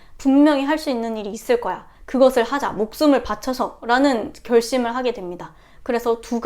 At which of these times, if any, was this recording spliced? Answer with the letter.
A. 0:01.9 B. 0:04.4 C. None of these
A